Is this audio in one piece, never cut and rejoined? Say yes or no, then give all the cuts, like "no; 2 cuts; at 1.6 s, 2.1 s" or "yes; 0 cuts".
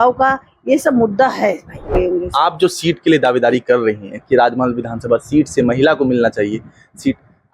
no; 1 cut; at 1.9 s